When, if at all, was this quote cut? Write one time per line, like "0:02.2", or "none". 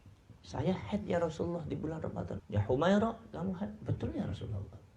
0:02.4